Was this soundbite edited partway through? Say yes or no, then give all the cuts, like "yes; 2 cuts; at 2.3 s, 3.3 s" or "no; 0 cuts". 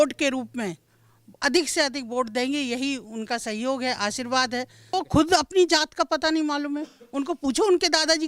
yes; 1 cut; at 4.8 s